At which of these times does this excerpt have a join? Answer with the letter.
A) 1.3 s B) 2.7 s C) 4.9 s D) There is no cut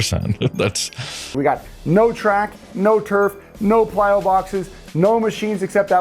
A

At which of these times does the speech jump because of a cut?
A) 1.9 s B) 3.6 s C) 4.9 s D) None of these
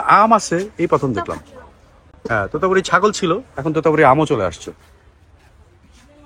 D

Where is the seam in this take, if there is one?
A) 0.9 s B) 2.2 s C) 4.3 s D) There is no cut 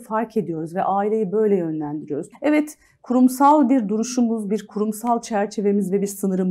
B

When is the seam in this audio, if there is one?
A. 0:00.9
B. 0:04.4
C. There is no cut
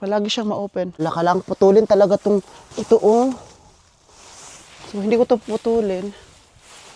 A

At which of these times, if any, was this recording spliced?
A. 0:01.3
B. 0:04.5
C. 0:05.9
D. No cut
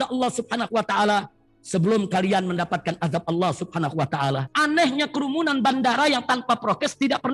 B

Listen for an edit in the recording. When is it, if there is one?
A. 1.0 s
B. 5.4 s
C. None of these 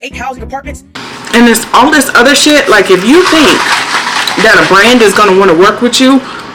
A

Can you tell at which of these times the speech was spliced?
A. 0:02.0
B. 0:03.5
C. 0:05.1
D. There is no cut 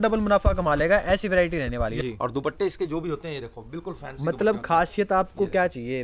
A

